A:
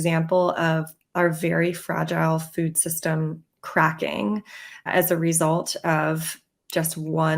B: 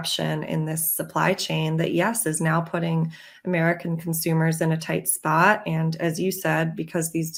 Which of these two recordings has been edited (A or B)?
A